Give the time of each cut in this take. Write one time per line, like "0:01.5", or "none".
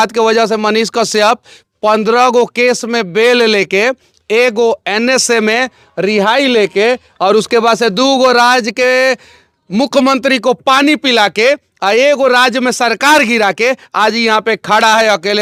none